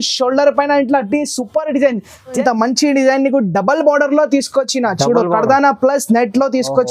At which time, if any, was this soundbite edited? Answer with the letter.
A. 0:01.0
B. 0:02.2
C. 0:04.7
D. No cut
B